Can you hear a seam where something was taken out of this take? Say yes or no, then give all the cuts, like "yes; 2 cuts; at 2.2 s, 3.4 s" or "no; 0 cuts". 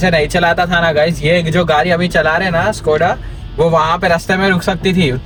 no; 0 cuts